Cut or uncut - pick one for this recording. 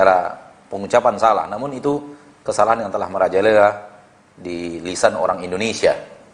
uncut